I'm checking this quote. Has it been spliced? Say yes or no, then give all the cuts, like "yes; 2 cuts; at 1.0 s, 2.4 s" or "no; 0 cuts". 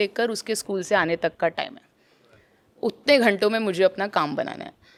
no; 0 cuts